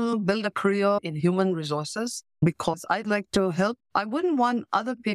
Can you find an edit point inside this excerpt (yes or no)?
yes